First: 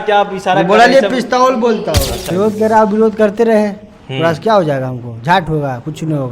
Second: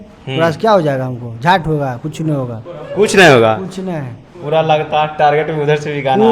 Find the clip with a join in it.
first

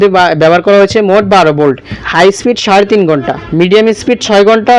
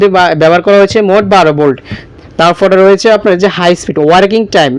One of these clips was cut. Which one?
first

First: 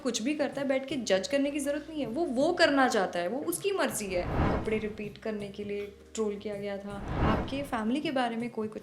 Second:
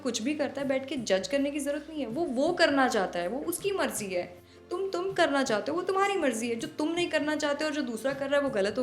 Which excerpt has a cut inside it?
first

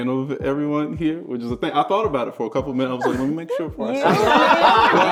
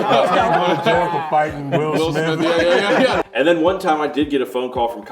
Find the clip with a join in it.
second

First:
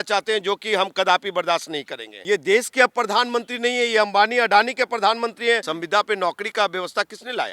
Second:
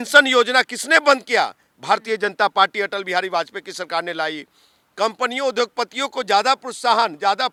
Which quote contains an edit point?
first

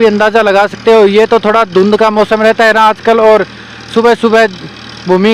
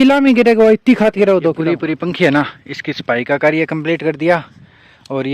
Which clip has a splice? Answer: second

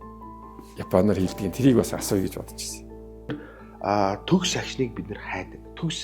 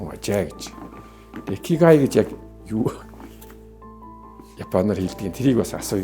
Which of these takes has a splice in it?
first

